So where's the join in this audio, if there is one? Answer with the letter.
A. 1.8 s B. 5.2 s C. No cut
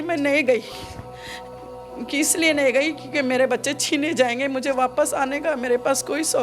C